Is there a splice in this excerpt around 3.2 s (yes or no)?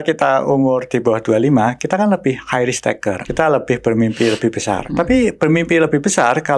yes